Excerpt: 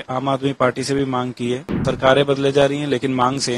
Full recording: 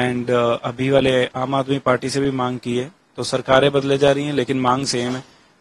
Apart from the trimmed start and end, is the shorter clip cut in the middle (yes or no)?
yes